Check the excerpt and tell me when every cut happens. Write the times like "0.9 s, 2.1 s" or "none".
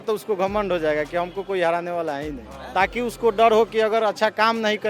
2.6 s